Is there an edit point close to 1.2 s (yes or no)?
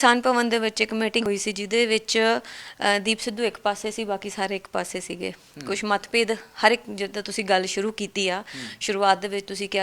yes